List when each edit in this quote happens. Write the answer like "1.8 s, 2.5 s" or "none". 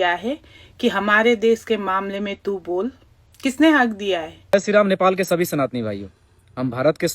4.3 s